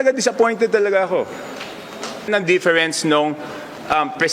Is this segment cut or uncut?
cut